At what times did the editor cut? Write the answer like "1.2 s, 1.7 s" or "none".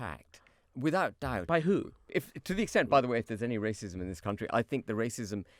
2.2 s